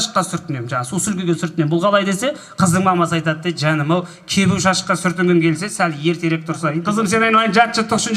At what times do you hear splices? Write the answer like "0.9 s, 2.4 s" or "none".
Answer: 6.8 s